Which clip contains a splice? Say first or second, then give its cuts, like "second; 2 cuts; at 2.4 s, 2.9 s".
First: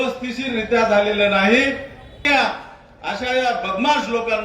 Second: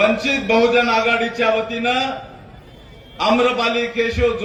first; 1 cut; at 2.2 s